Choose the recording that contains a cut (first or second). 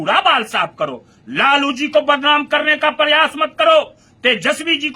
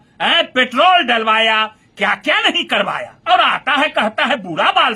second